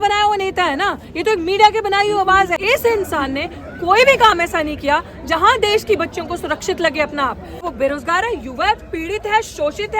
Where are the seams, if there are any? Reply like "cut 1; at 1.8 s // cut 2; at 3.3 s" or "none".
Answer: cut 1; at 2.6 s // cut 2; at 7.7 s